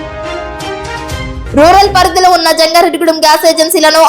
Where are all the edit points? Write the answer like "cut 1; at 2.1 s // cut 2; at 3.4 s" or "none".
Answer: cut 1; at 1.0 s